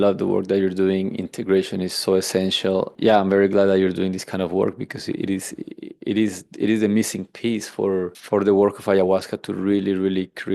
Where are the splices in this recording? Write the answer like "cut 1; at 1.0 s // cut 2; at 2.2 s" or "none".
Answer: cut 1; at 2.9 s